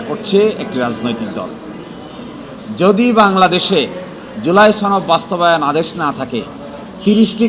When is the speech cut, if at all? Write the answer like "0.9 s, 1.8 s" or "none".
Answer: none

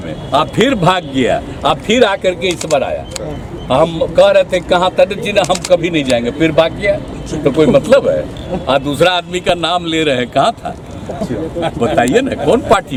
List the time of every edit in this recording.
none

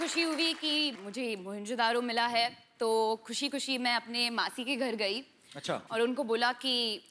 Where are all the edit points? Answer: 1.0 s

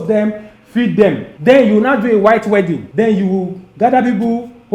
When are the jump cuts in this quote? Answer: 1.3 s, 2.8 s

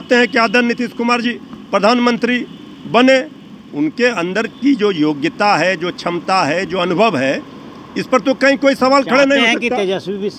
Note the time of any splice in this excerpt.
none

